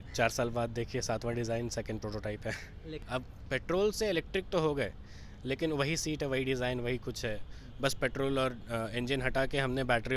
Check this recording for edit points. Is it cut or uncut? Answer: cut